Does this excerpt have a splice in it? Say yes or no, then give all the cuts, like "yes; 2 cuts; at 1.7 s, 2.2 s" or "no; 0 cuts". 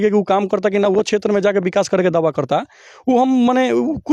no; 0 cuts